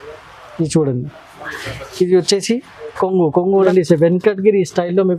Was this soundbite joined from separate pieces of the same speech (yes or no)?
yes